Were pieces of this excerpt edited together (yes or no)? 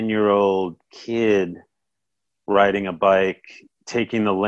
no